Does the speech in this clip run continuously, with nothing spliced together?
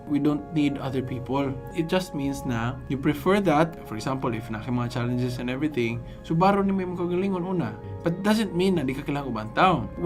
yes; 0 cuts

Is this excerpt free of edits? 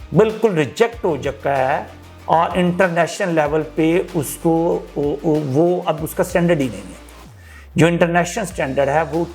yes; 0 cuts

